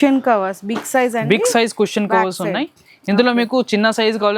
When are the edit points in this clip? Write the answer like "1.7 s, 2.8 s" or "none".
none